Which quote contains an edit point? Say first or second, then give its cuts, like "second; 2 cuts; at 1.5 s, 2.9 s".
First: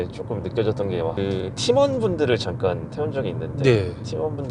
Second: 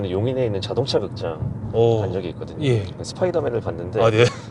first; 1 cut; at 1.2 s